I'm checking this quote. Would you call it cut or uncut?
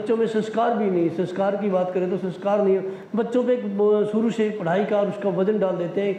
uncut